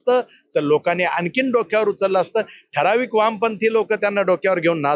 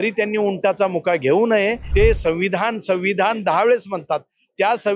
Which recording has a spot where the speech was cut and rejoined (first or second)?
second